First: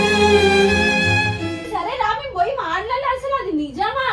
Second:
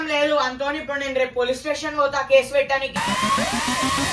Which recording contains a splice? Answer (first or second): first